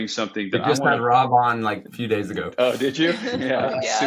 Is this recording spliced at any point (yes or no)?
no